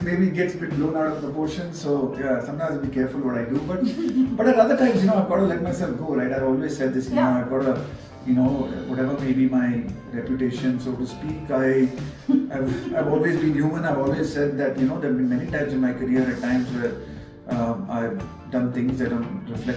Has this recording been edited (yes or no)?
no